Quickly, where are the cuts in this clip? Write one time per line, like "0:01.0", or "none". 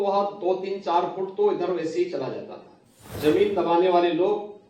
0:03.1